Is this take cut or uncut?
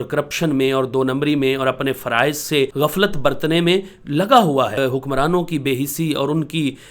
cut